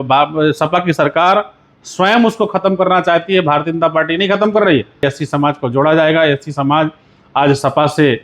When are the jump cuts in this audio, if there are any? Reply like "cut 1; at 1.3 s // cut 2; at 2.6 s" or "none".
cut 1; at 5.1 s